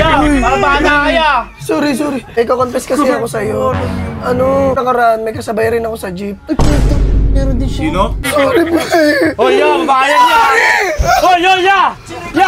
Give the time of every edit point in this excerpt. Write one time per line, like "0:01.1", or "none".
0:02.3
0:04.8
0:08.2